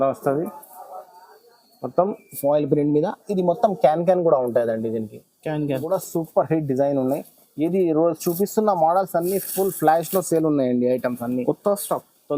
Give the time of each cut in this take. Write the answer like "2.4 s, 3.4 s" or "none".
5.9 s